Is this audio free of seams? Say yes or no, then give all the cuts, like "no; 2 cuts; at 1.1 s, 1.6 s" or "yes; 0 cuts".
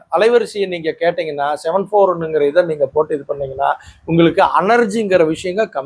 yes; 0 cuts